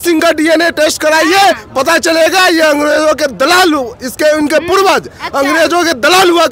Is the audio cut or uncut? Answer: uncut